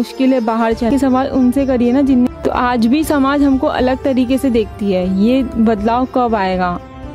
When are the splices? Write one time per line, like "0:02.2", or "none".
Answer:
0:00.9
0:02.3